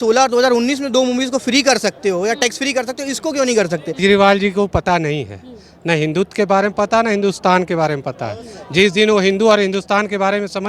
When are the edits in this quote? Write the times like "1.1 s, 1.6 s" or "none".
4.0 s